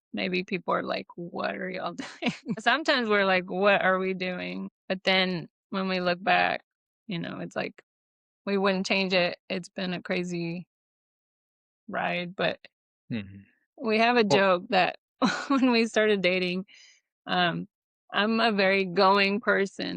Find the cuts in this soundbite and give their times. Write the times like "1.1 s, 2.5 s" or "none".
2.6 s, 4.7 s